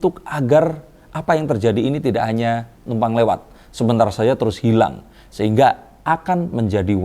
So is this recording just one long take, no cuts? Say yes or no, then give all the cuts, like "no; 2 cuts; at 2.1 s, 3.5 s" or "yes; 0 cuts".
yes; 0 cuts